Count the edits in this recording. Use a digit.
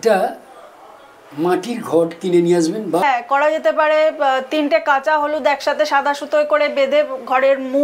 1